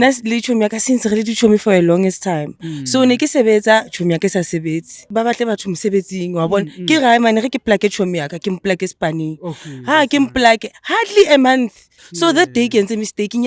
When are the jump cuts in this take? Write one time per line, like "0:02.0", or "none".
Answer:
0:05.1
0:12.0